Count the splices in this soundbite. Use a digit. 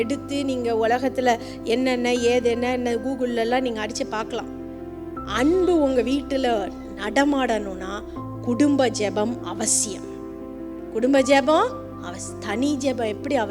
1